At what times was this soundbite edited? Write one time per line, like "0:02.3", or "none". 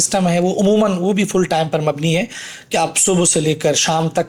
none